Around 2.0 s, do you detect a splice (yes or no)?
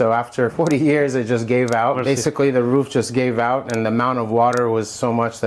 yes